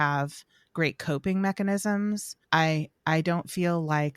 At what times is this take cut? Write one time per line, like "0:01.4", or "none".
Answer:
0:02.3